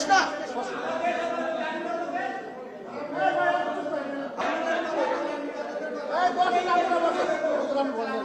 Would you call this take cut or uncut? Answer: cut